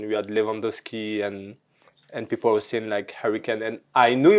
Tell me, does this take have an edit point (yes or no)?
no